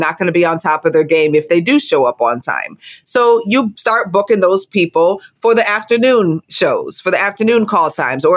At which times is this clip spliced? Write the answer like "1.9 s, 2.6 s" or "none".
4.7 s, 6.5 s